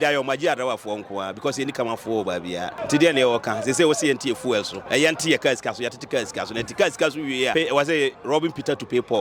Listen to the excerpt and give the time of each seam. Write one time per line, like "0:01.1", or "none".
0:02.8
0:04.8
0:07.5